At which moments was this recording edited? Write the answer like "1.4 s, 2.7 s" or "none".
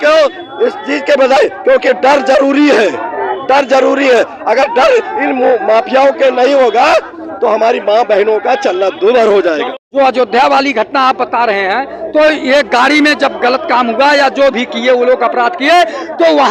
9.7 s